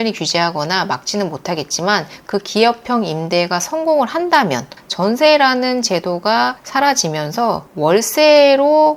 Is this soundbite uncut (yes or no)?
no